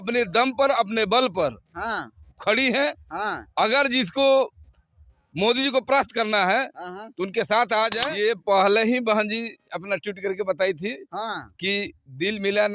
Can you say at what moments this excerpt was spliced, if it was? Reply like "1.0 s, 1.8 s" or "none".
8.0 s